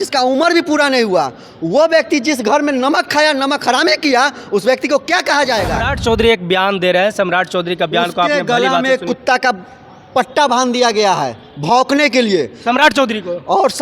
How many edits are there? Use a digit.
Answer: 1